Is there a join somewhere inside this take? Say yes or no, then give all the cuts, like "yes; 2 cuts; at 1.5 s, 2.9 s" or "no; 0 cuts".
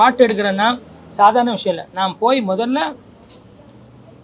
no; 0 cuts